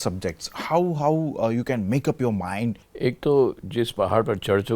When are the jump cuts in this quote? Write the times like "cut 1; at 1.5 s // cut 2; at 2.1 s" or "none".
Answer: cut 1; at 2.9 s

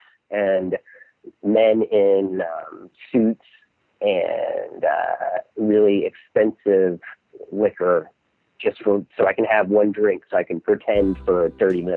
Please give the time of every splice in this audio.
none

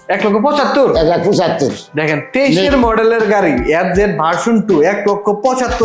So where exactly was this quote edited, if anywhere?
none

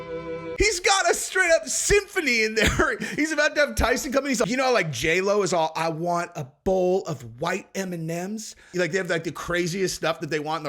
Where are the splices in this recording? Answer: cut 1; at 4.4 s // cut 2; at 8.7 s

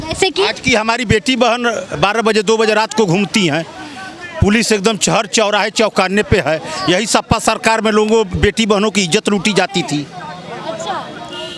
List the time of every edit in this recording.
none

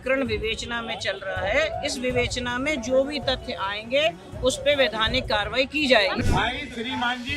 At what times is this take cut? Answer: cut 1; at 6.2 s

